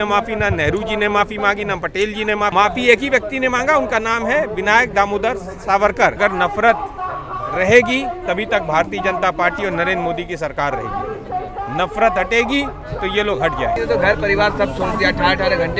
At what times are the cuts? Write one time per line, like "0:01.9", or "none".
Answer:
0:02.5
0:06.2
0:13.8